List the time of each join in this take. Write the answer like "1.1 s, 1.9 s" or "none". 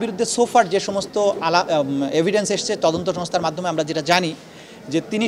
none

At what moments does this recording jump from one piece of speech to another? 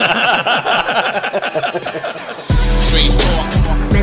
2.4 s

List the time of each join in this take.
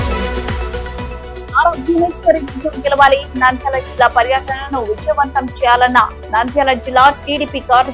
1.4 s

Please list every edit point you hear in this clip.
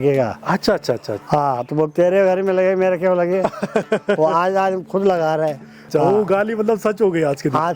1.1 s, 5.9 s

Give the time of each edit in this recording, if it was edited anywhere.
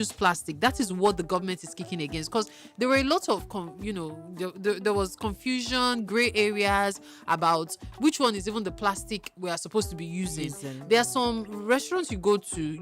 none

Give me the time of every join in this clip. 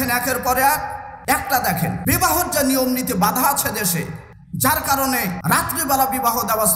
1.1 s, 2.0 s, 5.4 s

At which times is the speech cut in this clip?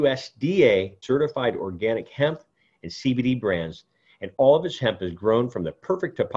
1.0 s

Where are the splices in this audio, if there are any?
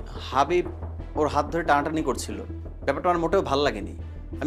none

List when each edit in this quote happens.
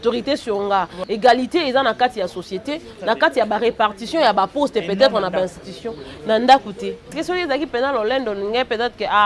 1.0 s, 7.0 s

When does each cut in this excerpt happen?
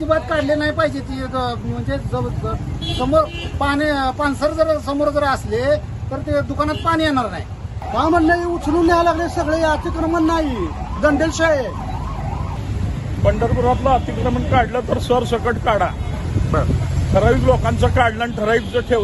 7.7 s, 12.6 s

